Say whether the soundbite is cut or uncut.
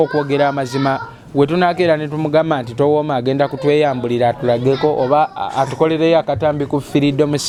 uncut